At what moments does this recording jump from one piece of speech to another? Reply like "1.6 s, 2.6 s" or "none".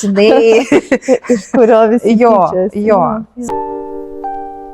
3.3 s